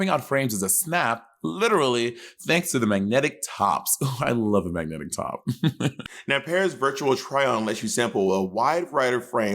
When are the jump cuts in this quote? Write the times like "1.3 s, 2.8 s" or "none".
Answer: 6.1 s

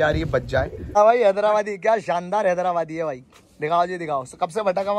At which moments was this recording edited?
0.9 s

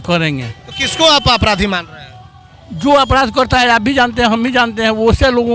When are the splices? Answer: none

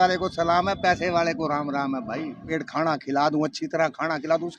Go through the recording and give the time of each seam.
2.4 s

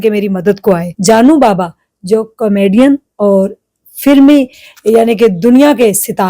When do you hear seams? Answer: 0.9 s

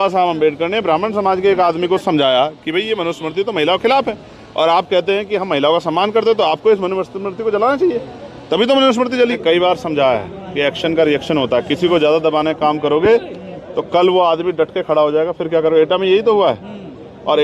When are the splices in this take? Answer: 9.4 s

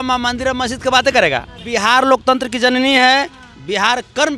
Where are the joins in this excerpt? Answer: 1.6 s

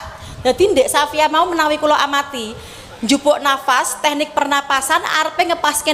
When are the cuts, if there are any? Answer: none

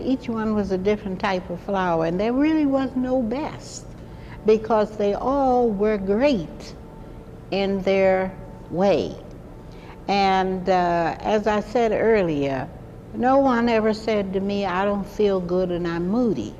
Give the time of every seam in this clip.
2.9 s

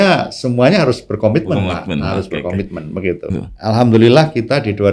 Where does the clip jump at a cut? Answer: 3.3 s

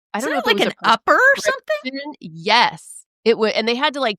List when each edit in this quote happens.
none

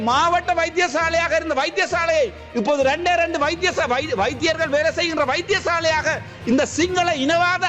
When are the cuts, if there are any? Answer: none

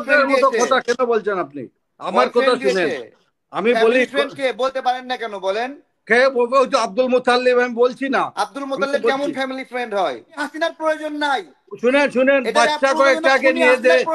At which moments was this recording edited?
10.4 s

